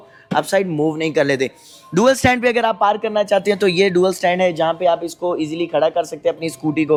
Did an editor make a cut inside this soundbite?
no; 0 cuts

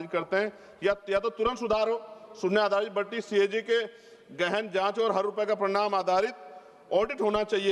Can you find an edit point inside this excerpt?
no; 0 cuts

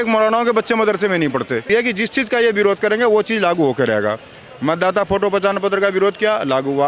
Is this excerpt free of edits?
no; 1 cut; at 1.7 s

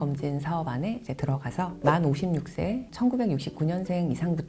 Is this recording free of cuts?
no; 1 cut; at 2.9 s

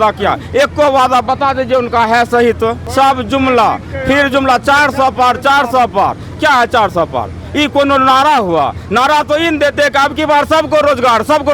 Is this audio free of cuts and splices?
no; 1 cut; at 2.8 s

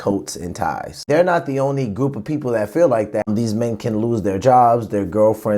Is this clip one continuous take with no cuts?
no; 2 cuts; at 1.0 s, 3.3 s

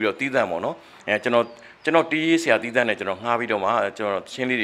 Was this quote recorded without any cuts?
yes; 0 cuts

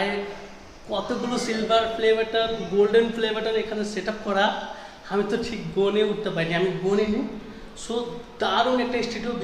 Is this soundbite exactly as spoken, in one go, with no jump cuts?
yes; 0 cuts

